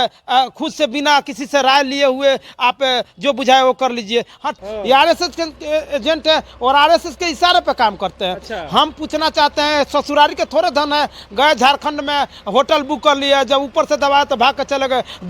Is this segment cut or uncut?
cut